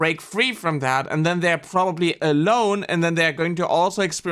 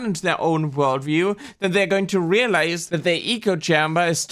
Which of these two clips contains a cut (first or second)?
second